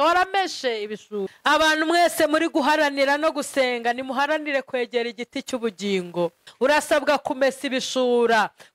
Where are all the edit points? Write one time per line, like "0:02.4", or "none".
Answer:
0:01.3
0:06.5